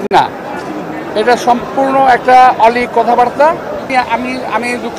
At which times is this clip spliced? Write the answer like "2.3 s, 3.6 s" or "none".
3.9 s